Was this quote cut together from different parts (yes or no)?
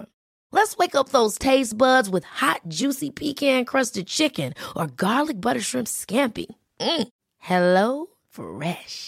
no